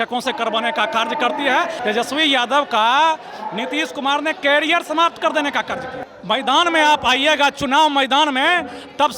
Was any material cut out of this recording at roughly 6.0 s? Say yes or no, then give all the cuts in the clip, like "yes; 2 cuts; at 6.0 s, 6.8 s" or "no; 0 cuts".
yes; 2 cuts; at 1.8 s, 6.0 s